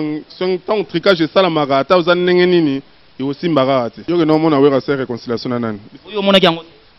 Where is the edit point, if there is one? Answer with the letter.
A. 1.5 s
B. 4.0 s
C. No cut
B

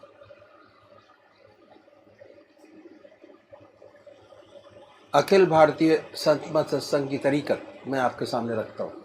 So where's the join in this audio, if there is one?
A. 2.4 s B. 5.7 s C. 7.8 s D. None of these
B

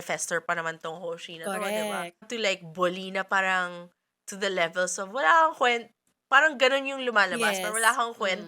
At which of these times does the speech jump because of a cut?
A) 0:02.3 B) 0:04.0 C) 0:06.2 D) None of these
A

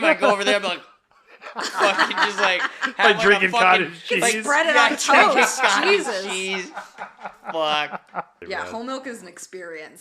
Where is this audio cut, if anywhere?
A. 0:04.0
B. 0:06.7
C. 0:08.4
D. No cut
C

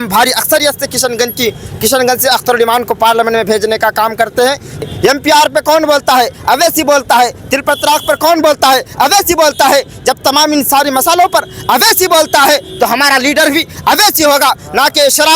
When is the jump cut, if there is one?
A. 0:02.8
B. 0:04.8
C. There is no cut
B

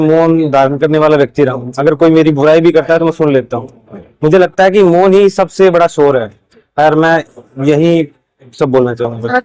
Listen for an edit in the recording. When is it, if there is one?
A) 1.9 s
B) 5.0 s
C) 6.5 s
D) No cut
D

